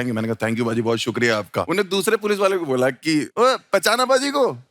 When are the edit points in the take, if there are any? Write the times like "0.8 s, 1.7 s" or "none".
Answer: 1.7 s, 3.3 s